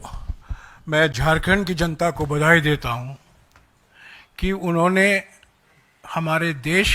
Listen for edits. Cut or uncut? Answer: uncut